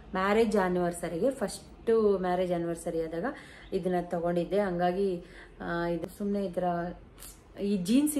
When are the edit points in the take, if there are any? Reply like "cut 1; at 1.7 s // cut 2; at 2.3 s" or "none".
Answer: cut 1; at 6.0 s